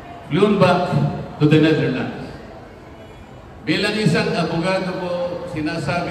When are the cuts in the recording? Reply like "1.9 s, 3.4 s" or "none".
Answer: none